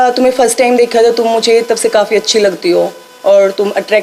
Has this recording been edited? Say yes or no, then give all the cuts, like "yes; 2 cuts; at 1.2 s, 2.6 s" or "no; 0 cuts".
no; 0 cuts